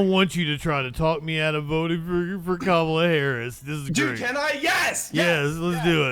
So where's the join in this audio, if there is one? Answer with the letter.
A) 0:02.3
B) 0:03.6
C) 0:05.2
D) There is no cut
D